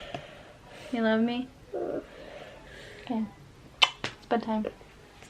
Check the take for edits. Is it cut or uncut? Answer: uncut